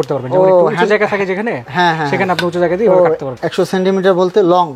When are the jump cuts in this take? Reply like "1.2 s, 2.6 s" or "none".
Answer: 3.4 s